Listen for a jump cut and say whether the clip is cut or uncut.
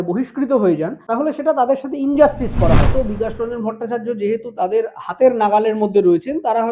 cut